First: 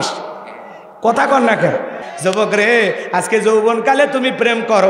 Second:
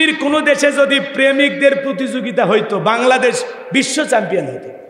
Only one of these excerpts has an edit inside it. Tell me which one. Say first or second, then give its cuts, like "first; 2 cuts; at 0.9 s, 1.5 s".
first; 1 cut; at 2.0 s